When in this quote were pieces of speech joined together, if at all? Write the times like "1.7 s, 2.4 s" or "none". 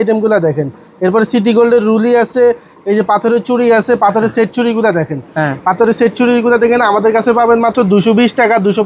none